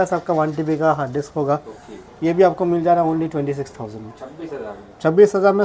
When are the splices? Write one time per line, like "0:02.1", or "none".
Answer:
none